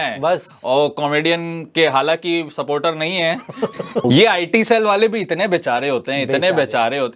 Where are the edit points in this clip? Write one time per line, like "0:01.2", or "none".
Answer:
0:04.0